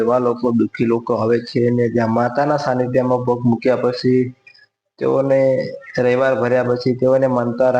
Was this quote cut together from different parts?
no; 0 cuts

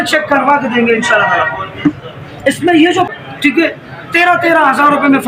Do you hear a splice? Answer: yes; 1 cut; at 3.1 s

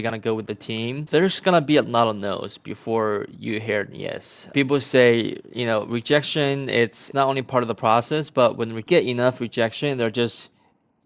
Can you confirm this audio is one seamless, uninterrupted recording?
no; 4 cuts; at 1.0 s, 4.5 s, 7.0 s, 8.8 s

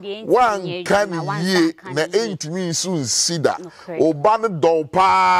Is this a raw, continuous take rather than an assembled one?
yes; 0 cuts

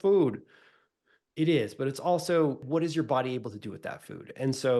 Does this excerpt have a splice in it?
yes; 1 cut; at 2.6 s

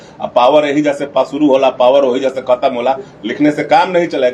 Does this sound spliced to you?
no; 0 cuts

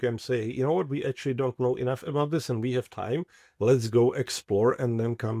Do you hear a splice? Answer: no; 0 cuts

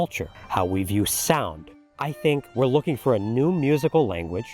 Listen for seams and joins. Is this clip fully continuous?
no; 1 cut; at 1.8 s

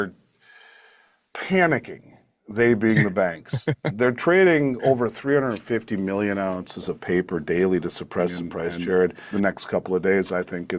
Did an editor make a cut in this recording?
yes; 1 cut; at 9.2 s

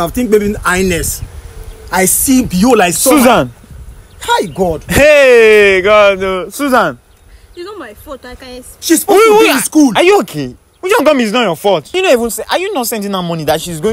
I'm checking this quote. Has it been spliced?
yes; 1 cut; at 11.9 s

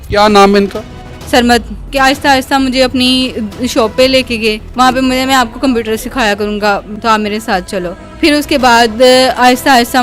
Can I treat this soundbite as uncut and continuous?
no; 4 cuts; at 1.9 s, 4.6 s, 6.9 s, 8.0 s

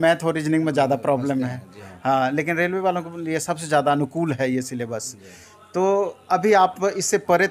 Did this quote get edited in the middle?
no; 0 cuts

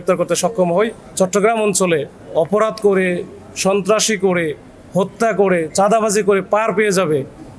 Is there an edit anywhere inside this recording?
yes; 1 cut; at 1.0 s

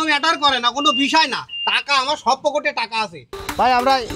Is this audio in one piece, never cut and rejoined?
no; 1 cut; at 3.2 s

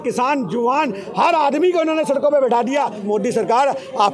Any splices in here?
yes; 1 cut; at 3.0 s

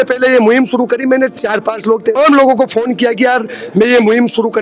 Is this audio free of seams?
no; 1 cut; at 2.1 s

